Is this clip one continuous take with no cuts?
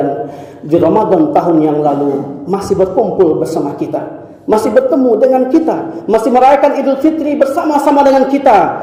yes; 0 cuts

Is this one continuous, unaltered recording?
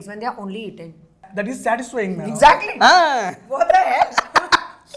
no; 1 cut; at 1.3 s

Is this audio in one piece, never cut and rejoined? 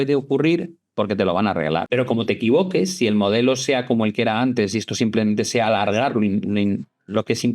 no; 1 cut; at 1.9 s

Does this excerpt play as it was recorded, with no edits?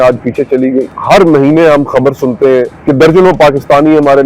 no; 2 cuts; at 0.9 s, 2.7 s

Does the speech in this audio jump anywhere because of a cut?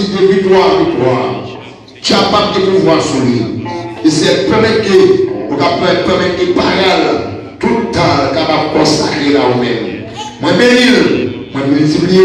no; 0 cuts

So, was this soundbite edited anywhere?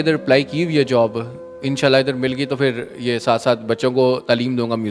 no; 0 cuts

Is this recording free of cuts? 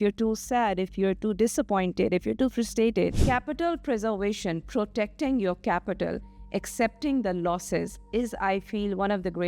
no; 1 cut; at 3.2 s

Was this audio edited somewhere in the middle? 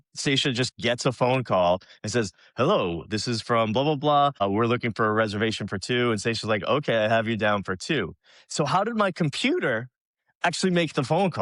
yes; 1 cut; at 4.3 s

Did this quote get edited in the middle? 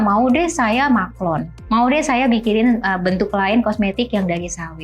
yes; 1 cut; at 1.5 s

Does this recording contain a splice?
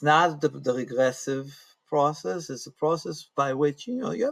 no; 0 cuts

